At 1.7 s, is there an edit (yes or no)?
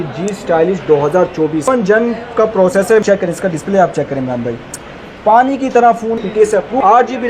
yes